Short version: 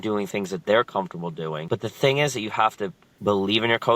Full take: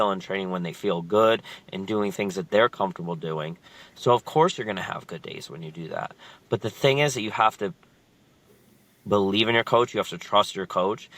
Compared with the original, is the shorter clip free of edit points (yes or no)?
no